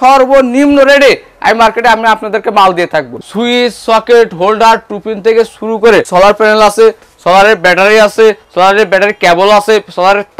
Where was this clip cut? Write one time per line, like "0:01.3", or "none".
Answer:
0:03.1
0:06.1